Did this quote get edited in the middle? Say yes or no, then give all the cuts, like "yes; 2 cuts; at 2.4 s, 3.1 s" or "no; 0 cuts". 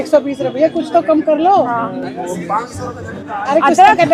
no; 0 cuts